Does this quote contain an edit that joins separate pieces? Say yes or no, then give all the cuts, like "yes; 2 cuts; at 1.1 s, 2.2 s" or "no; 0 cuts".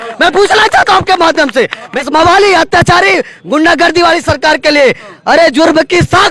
no; 0 cuts